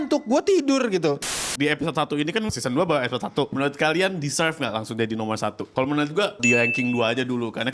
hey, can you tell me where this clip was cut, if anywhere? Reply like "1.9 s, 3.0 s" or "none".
1.3 s, 2.5 s, 3.5 s, 5.6 s, 6.4 s